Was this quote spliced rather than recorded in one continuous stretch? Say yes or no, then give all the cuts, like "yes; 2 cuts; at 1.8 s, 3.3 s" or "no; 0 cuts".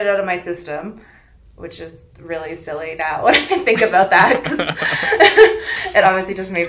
no; 0 cuts